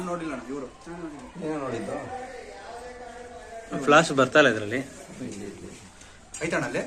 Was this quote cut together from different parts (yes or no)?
no